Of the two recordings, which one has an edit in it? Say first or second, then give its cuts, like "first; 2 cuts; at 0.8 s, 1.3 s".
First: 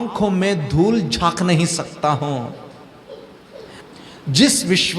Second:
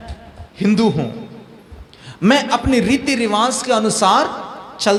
first; 1 cut; at 3.7 s